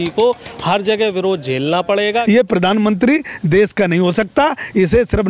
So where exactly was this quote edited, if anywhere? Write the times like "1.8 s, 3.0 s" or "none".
2.2 s

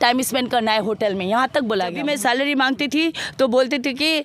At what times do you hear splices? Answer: 2.0 s

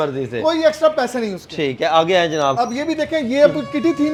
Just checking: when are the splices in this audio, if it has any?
none

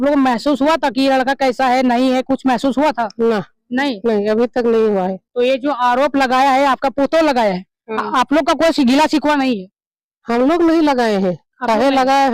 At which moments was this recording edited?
none

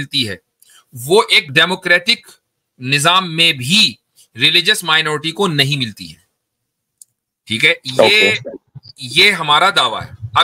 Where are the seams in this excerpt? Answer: 1.4 s

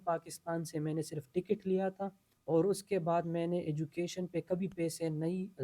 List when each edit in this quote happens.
2.3 s

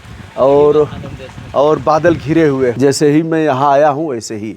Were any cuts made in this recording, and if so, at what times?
2.8 s

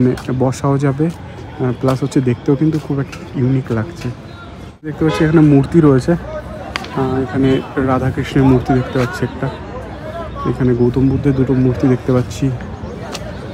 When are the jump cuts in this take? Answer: 4.9 s

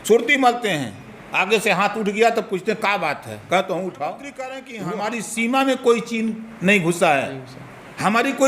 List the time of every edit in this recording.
4.6 s

